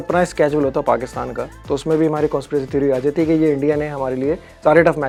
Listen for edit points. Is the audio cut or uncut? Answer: uncut